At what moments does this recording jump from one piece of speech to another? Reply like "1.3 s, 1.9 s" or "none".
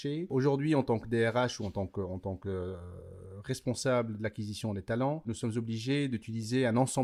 none

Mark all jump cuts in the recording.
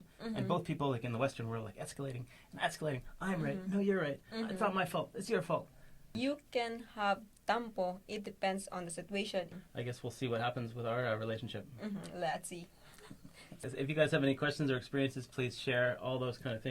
6.1 s, 9.5 s, 13.6 s

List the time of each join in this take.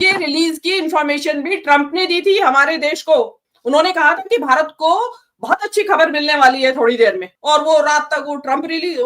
3.5 s, 7.3 s

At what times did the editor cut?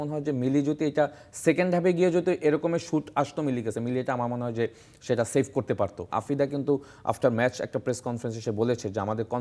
6.0 s

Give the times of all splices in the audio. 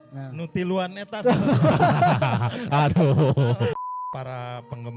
3.8 s

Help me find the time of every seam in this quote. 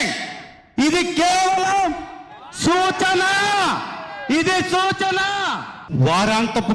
5.7 s

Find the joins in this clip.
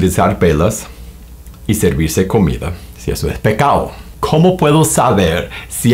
4.0 s

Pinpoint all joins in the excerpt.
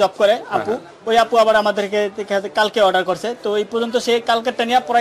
none

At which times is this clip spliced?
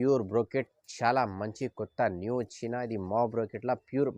none

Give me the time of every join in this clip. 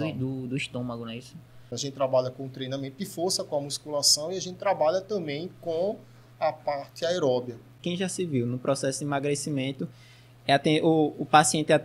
1.8 s, 7.7 s

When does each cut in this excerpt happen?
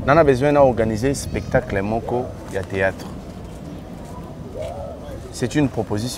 none

